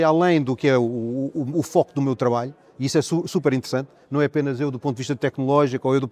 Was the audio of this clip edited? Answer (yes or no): no